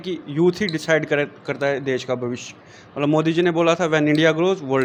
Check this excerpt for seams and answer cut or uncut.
uncut